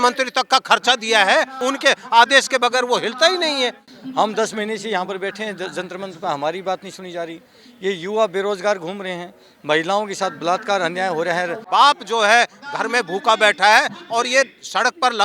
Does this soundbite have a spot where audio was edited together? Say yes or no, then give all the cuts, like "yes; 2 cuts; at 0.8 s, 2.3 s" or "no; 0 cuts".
yes; 3 cuts; at 1.6 s, 3.9 s, 11.6 s